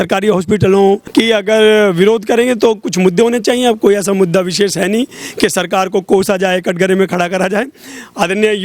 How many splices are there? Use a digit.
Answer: 1